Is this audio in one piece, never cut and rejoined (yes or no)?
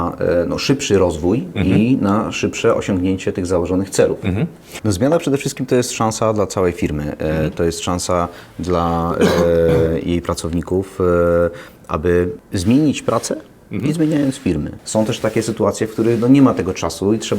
no